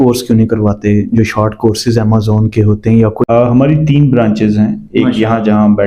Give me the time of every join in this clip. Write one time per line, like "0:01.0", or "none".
0:03.2